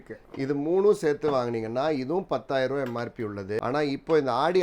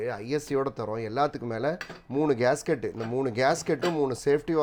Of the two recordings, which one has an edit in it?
first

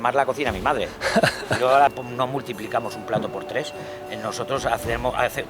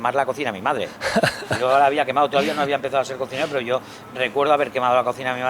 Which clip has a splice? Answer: first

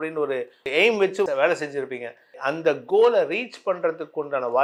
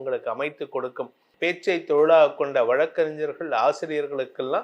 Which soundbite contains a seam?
second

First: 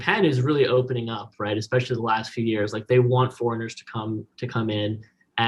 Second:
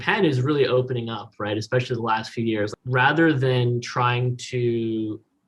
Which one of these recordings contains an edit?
second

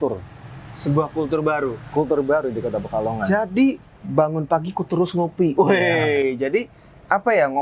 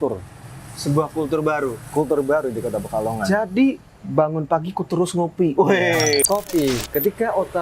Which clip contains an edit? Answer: second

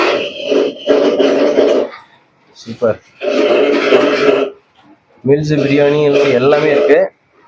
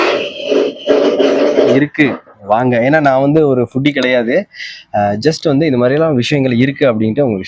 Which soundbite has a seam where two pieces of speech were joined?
second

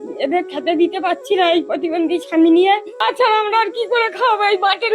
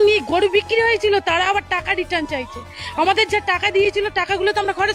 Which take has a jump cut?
first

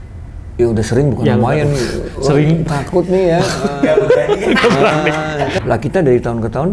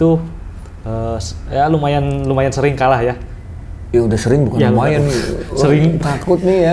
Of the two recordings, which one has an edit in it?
first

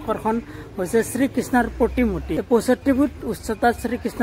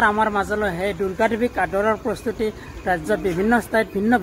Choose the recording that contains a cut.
first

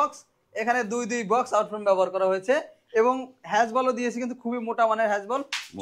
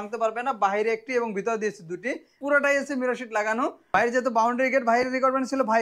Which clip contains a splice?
second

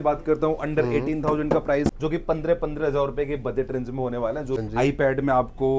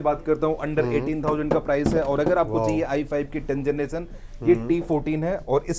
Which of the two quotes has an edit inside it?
first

